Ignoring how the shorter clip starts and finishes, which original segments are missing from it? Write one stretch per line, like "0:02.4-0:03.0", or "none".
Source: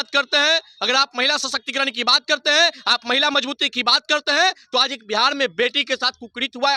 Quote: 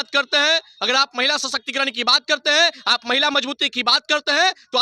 none